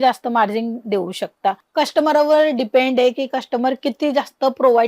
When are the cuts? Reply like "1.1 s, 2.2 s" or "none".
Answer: none